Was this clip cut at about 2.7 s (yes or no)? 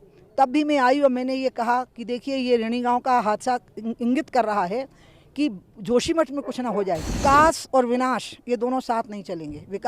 no